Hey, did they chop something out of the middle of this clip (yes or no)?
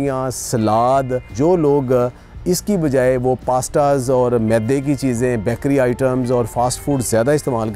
yes